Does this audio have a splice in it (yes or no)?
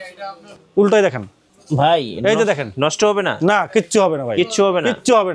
no